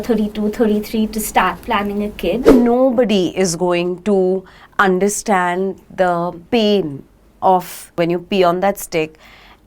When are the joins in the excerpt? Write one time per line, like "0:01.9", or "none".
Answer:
0:02.5
0:06.4
0:08.0